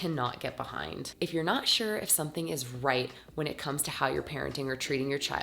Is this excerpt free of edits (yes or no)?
no